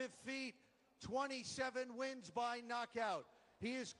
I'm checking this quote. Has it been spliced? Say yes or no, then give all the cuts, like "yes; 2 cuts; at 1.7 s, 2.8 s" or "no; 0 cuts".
no; 0 cuts